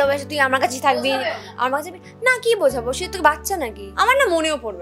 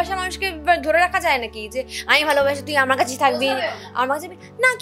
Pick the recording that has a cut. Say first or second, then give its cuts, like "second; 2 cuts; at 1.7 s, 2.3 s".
first; 1 cut; at 3.8 s